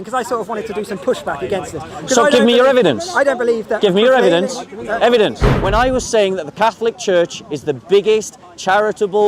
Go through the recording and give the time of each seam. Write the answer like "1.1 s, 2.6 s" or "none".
5.5 s